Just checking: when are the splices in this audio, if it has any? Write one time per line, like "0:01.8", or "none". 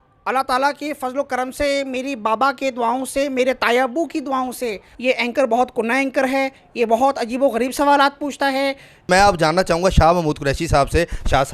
0:04.9
0:09.1